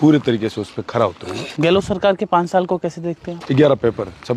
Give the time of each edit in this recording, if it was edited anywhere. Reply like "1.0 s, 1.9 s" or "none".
1.5 s, 3.3 s